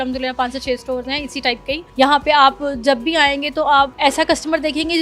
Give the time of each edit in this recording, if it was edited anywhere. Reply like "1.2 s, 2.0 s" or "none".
1.8 s, 3.9 s